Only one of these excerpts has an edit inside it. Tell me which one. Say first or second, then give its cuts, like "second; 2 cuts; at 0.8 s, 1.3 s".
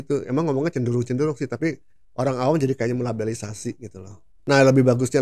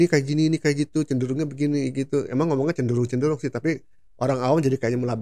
first; 1 cut; at 4.3 s